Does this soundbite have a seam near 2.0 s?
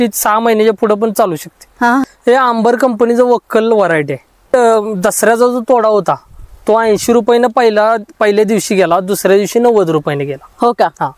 yes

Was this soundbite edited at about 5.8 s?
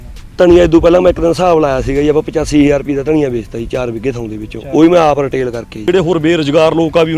yes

